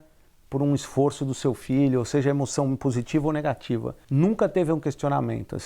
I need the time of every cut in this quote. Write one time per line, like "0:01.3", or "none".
0:04.0